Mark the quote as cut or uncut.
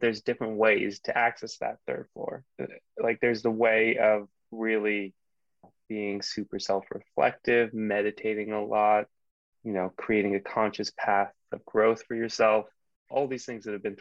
uncut